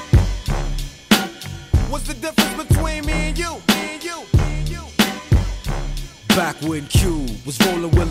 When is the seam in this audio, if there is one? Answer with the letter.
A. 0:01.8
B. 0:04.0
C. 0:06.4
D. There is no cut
A